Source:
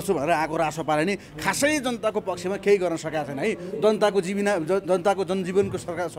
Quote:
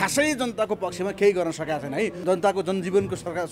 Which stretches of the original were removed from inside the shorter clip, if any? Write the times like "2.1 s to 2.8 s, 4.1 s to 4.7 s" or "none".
3.7 s to 4.8 s